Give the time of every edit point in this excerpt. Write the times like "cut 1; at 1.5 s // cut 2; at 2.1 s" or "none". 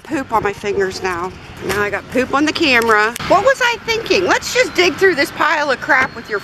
cut 1; at 1.5 s // cut 2; at 3.2 s